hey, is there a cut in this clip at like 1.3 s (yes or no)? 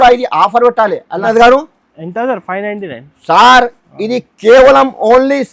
yes